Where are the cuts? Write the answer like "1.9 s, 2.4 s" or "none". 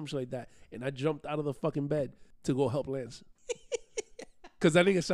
2.2 s, 3.3 s